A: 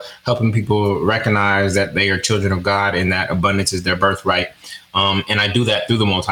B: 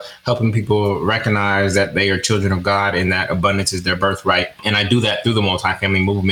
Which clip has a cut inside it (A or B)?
B